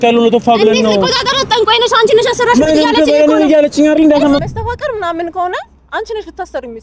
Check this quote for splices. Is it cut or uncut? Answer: cut